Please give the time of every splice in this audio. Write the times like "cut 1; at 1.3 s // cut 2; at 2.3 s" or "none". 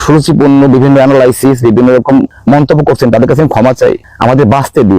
cut 1; at 2.3 s // cut 2; at 4.1 s